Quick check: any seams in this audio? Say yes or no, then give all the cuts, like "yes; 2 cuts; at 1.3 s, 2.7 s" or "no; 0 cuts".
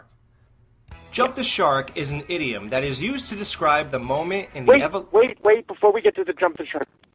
no; 0 cuts